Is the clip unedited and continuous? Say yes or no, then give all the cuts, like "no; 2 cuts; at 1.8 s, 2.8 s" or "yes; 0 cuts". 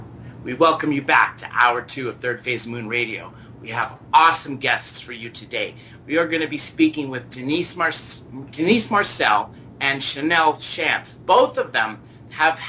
no; 1 cut; at 6.7 s